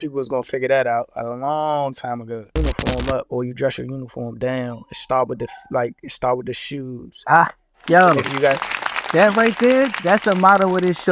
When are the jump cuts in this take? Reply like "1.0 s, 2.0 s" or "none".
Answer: 2.5 s